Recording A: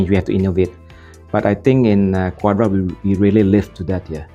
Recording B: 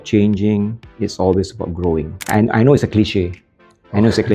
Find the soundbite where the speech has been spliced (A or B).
B